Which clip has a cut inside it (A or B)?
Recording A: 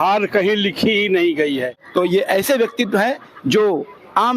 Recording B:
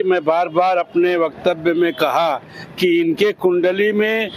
A